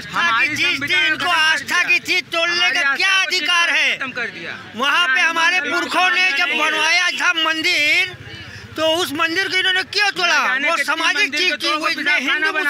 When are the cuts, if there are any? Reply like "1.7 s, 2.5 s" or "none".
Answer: none